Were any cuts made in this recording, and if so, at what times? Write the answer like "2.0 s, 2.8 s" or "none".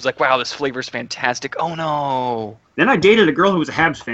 2.6 s